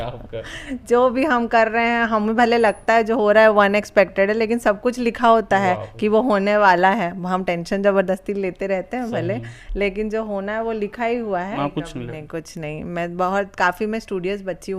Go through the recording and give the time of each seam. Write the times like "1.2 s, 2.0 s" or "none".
11.6 s

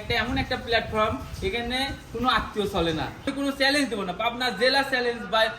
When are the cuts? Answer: 3.3 s

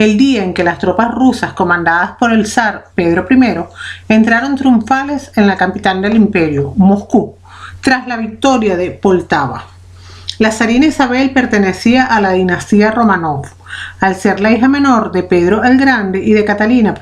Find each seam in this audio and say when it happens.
2.1 s

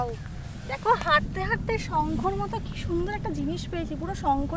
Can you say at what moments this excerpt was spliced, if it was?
none

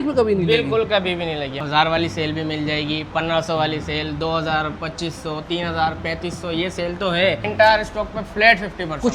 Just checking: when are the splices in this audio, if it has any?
1.6 s, 7.5 s

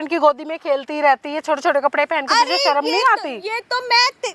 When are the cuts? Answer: none

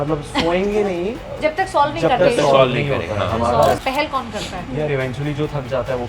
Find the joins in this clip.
3.8 s

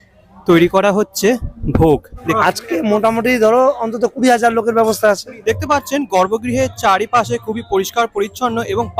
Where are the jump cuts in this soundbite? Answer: 2.3 s, 5.3 s

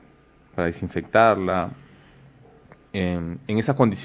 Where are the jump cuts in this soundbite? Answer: none

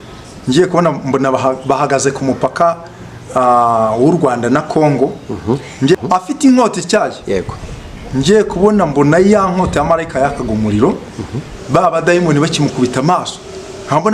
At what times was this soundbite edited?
6.0 s

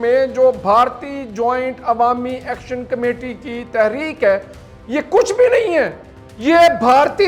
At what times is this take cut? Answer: none

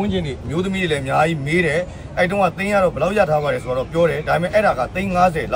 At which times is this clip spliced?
none

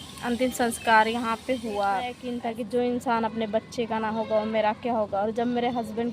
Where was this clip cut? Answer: 2.2 s

